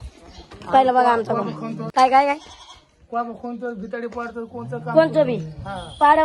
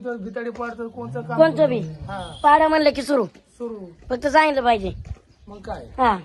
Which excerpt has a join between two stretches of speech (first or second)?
first